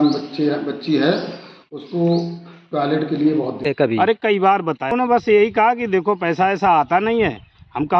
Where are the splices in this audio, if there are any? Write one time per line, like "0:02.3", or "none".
0:03.7
0:04.9